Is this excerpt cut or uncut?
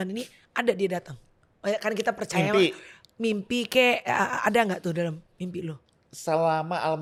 uncut